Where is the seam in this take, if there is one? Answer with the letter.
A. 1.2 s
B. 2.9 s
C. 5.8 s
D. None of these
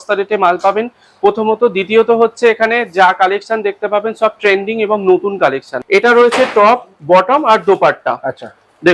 C